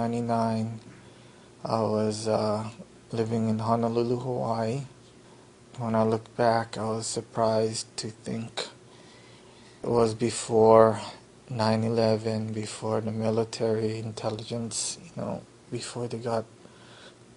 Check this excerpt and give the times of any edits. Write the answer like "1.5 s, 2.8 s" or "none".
none

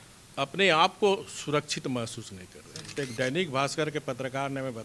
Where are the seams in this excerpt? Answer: 2.9 s

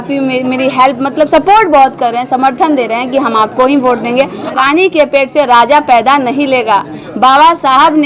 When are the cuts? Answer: 4.5 s

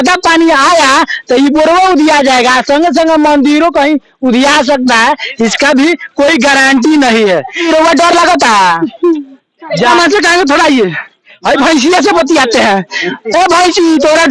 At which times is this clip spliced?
7.6 s, 9.9 s

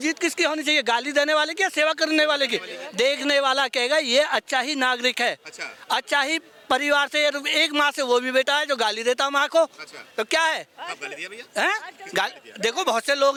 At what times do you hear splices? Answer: none

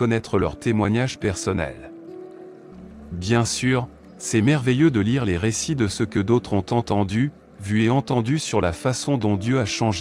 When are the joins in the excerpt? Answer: none

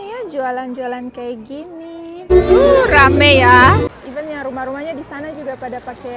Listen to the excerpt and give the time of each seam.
2.2 s, 4.0 s

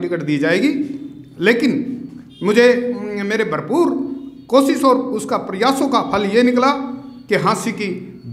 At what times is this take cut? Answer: none

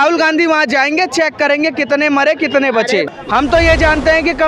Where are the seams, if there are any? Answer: 3.1 s

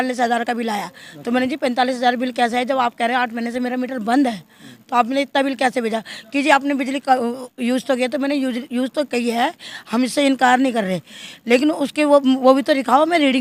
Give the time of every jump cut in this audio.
none

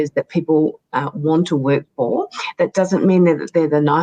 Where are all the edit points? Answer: none

